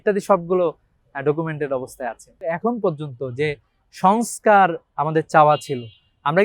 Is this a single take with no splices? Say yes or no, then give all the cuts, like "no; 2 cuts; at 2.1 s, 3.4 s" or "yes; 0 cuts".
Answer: no; 1 cut; at 2.3 s